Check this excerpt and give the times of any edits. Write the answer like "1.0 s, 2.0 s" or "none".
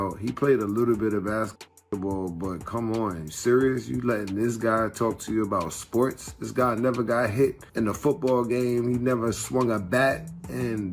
7.6 s